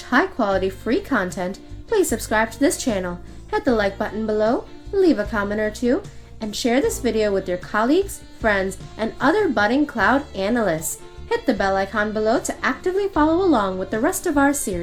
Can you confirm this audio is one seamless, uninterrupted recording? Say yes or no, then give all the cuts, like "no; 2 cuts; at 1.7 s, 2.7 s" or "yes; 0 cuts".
yes; 0 cuts